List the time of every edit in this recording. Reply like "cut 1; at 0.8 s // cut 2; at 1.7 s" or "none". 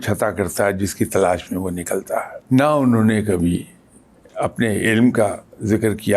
cut 1; at 2.3 s